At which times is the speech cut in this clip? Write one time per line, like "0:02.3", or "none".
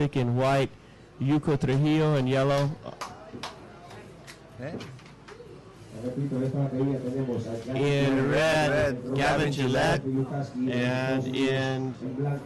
0:07.7